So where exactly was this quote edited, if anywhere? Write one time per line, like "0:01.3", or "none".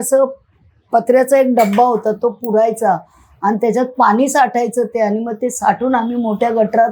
none